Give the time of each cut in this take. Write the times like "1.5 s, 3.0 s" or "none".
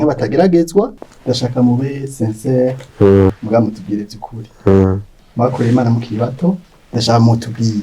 1.1 s, 3.4 s, 6.8 s